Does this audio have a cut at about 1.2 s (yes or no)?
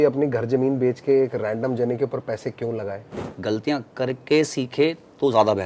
no